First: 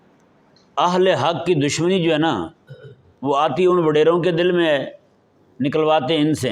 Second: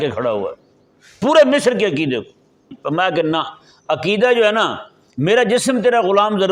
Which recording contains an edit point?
second; 1 cut; at 2.8 s

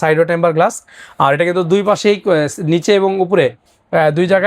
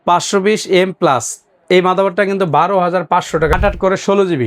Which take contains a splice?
second; 1 cut; at 3.5 s

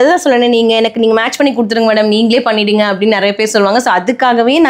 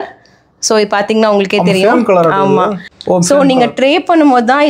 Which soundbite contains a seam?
second; 1 cut; at 2.9 s

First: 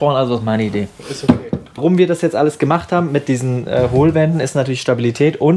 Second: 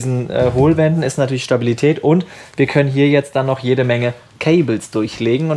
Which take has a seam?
first; 1 cut; at 1.8 s

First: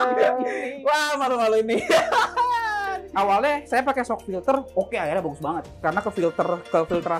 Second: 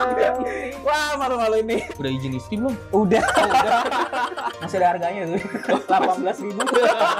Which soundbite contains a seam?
second; 1 cut; at 1.8 s

